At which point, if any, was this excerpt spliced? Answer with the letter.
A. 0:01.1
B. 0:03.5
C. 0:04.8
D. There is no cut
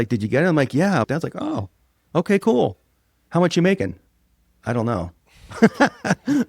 A